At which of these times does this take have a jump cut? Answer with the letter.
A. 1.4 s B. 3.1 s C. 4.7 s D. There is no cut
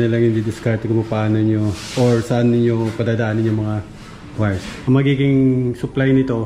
C